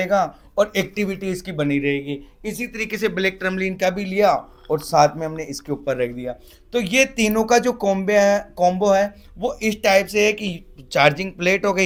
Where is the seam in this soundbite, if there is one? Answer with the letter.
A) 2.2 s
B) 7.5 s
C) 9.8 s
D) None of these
D